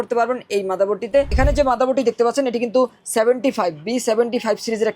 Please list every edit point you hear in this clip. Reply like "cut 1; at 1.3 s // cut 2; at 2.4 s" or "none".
cut 1; at 1.3 s